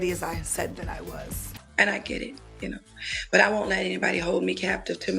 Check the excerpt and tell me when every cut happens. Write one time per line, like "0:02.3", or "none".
0:01.6